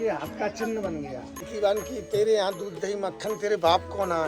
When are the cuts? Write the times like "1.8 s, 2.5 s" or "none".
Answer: 1.5 s